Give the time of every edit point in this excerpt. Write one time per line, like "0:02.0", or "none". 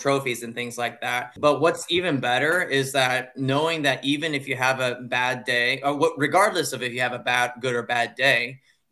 0:01.3